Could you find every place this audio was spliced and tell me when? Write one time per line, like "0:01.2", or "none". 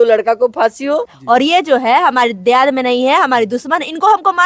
0:01.1